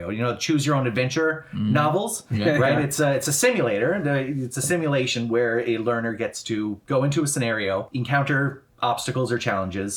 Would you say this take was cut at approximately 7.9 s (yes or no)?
yes